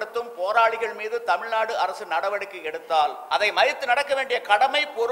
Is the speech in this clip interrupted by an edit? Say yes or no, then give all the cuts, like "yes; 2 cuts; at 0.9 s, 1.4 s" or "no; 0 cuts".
yes; 1 cut; at 3.2 s